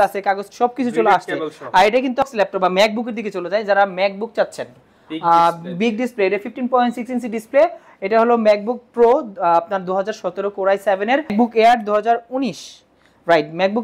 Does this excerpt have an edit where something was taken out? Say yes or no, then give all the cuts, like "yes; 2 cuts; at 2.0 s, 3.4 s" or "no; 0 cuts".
yes; 2 cuts; at 2.3 s, 11.3 s